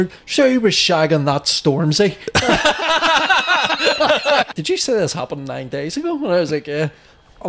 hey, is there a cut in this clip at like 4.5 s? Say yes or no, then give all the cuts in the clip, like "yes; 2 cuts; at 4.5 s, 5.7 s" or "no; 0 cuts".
yes; 1 cut; at 4.5 s